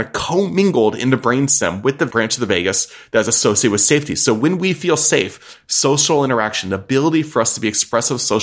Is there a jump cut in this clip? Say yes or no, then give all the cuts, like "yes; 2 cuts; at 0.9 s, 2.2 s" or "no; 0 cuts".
no; 0 cuts